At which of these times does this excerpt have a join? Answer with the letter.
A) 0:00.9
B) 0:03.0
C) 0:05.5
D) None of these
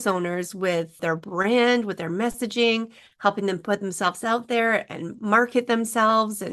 A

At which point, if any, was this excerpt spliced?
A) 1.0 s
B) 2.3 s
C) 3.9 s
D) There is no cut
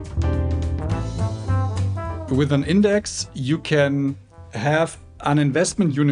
B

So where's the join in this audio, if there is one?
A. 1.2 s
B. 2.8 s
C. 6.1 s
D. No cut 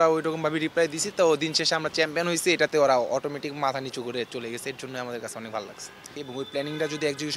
C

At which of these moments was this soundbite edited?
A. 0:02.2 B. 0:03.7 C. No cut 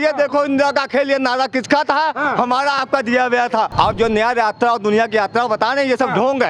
B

